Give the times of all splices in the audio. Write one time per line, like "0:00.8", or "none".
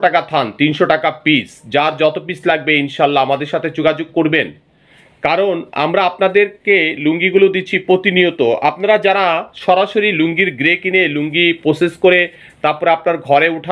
none